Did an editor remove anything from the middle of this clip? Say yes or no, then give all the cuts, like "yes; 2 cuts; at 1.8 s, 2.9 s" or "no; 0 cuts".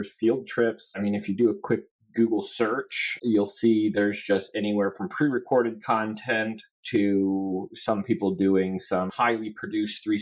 yes; 3 cuts; at 1.0 s, 3.1 s, 9.1 s